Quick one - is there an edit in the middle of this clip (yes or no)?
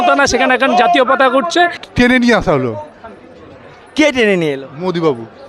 yes